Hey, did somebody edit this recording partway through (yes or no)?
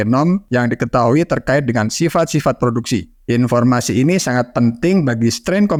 no